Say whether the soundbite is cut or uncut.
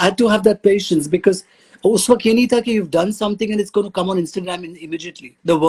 uncut